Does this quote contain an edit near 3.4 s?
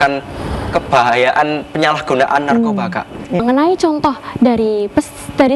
yes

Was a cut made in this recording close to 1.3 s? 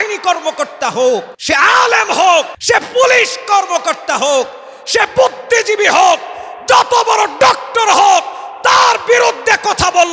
yes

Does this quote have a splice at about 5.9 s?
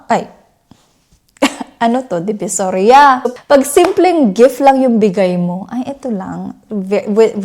no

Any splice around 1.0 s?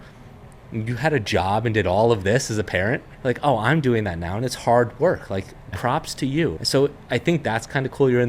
no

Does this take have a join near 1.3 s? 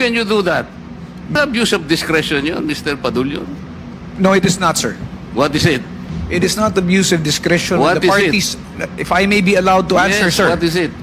yes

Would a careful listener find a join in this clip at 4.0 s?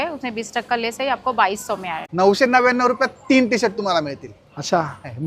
no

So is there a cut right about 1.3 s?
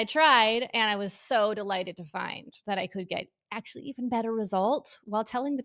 no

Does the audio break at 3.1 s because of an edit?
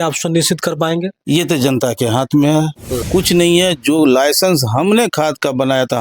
yes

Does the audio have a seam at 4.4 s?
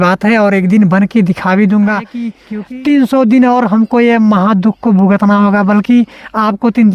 no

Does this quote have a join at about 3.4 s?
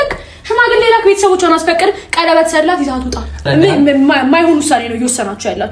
yes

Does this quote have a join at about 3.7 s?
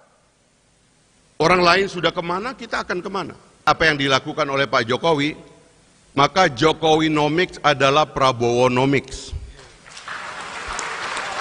yes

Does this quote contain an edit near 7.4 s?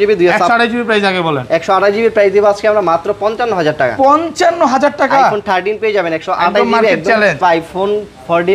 yes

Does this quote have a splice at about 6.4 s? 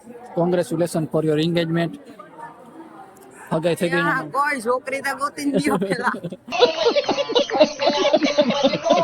yes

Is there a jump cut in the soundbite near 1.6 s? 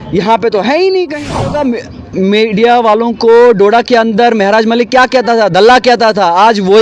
yes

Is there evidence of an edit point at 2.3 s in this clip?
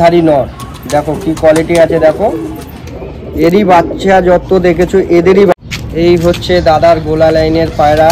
no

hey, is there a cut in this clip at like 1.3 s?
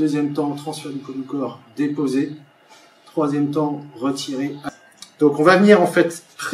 no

